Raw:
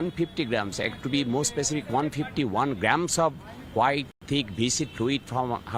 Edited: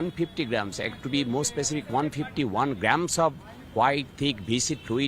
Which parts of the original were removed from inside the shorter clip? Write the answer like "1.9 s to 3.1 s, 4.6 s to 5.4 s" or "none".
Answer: 4.1 s to 4.2 s